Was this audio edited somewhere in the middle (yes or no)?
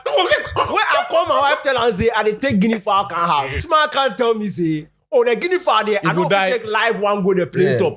yes